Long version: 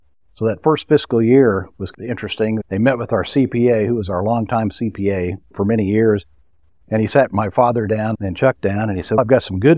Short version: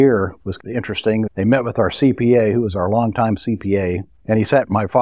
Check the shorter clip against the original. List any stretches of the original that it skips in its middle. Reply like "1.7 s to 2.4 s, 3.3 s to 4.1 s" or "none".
5.4 s to 6.7 s